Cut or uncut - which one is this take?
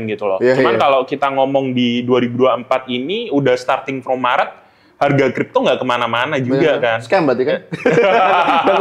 uncut